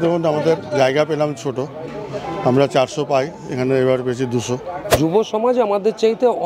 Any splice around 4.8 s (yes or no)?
yes